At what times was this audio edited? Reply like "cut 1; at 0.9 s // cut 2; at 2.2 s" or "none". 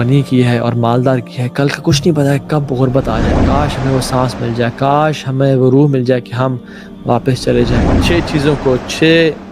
cut 1; at 3.4 s // cut 2; at 7.9 s